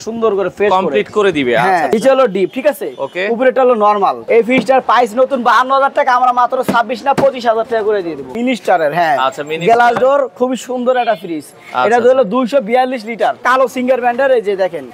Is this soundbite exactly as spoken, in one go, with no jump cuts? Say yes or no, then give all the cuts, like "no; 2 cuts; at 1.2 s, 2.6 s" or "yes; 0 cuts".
no; 4 cuts; at 1.9 s, 4.2 s, 8.3 s, 13.4 s